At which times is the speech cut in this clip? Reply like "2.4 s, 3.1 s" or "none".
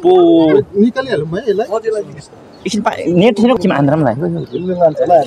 3.6 s